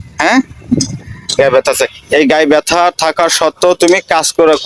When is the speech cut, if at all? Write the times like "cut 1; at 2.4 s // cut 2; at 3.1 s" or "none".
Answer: none